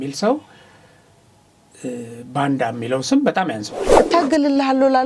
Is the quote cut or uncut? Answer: cut